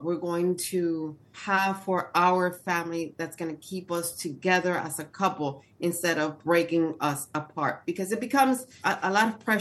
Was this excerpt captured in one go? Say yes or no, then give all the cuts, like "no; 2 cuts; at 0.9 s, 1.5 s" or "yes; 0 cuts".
no; 2 cuts; at 1.4 s, 8.7 s